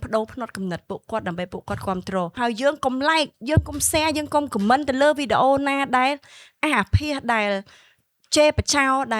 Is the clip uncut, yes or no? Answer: no